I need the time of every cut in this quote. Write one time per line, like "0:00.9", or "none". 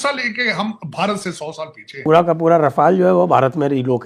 0:01.9